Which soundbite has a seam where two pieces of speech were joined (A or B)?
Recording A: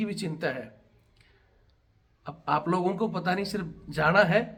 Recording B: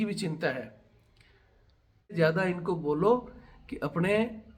B